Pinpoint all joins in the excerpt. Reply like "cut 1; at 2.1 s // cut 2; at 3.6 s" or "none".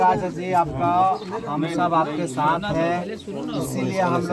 none